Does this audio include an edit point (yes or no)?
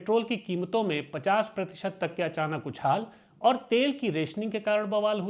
no